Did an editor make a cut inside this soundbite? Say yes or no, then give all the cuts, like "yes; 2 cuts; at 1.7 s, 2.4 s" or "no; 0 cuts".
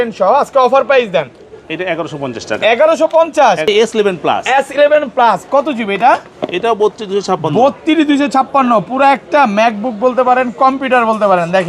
yes; 1 cut; at 3.7 s